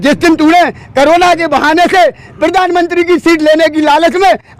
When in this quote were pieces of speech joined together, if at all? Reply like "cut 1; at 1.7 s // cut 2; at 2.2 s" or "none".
none